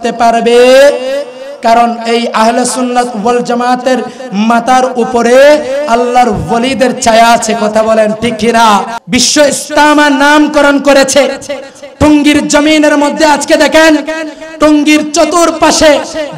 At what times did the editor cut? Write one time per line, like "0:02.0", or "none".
0:09.0